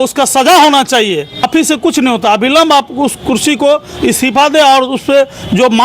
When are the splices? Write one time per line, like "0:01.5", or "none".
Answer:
0:01.5